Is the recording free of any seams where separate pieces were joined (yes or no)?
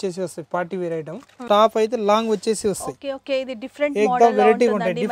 no